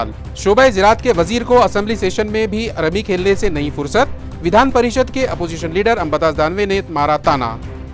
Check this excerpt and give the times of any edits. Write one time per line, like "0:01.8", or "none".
none